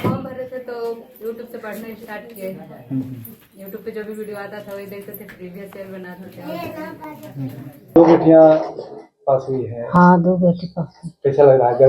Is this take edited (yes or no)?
yes